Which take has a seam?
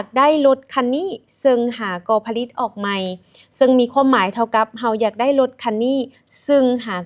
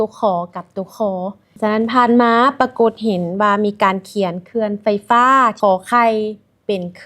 second; 2 cuts; at 1.5 s, 5.6 s

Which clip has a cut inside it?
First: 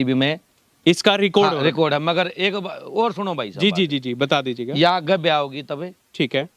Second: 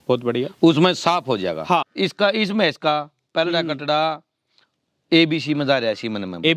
second; 1 cut; at 1.9 s

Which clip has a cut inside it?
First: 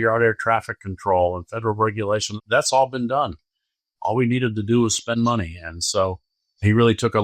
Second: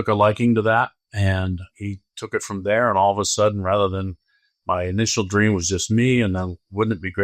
first; 1 cut; at 2.3 s

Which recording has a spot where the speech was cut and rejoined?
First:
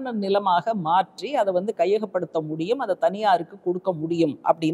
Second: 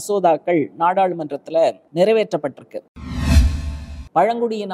second; 2 cuts; at 1.8 s, 3.4 s

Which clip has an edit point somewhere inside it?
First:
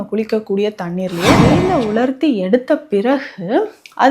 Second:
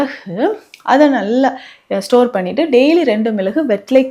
first; 1 cut; at 1.5 s

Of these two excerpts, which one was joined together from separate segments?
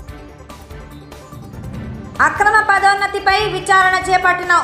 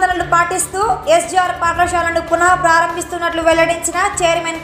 first; 1 cut; at 1.9 s

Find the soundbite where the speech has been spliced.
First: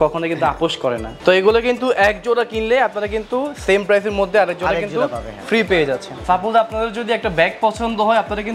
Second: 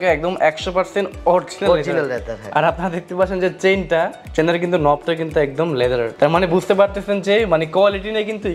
first; 2 cuts; at 1.1 s, 6.1 s

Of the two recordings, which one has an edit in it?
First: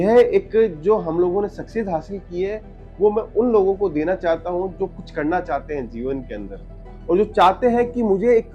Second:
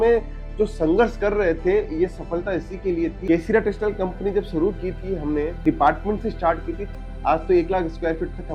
second; 3 cuts; at 3.2 s, 5.6 s, 6.8 s

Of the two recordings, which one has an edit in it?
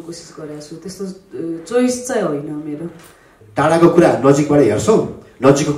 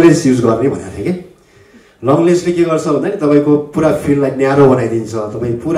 first; 1 cut; at 3.3 s

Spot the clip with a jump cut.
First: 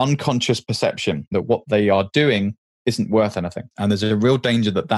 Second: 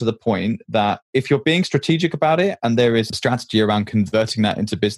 first; 2 cuts; at 1.3 s, 3.6 s

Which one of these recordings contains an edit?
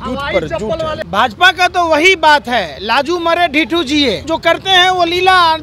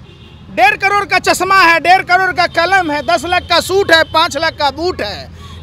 first; 2 cuts; at 1.0 s, 4.2 s

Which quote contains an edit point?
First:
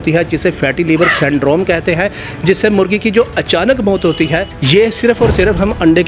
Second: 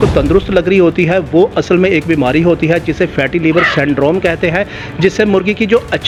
first; 1 cut; at 4.5 s

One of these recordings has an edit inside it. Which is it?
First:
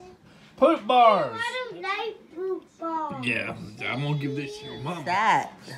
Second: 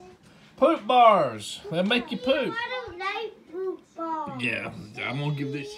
first; 1 cut; at 1.5 s

